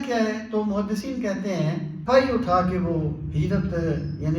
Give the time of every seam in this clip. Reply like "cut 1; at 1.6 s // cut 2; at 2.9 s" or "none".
cut 1; at 2.0 s